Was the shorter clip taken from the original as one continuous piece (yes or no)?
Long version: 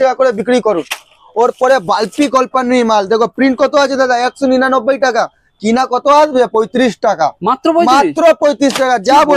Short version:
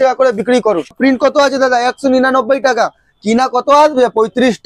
no